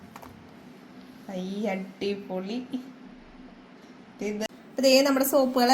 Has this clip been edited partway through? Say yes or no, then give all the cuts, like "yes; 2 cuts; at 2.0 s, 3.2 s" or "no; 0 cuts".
yes; 1 cut; at 4.5 s